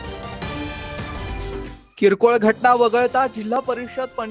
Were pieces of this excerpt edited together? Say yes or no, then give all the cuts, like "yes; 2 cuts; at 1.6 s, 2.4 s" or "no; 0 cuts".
yes; 1 cut; at 1.7 s